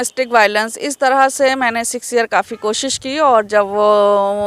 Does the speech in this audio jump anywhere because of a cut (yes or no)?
no